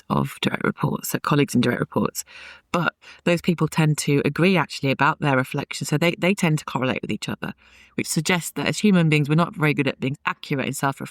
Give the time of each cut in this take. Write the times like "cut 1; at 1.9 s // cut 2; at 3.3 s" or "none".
cut 1; at 10.2 s